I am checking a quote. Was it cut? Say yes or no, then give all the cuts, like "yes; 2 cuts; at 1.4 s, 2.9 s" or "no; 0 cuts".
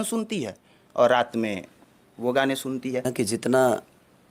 yes; 1 cut; at 3.1 s